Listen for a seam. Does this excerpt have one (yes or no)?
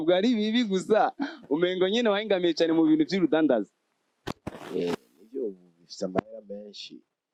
no